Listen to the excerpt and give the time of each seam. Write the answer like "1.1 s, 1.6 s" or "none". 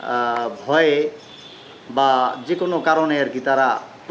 none